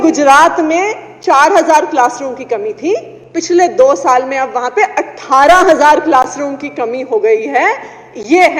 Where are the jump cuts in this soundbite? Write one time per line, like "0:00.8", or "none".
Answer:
none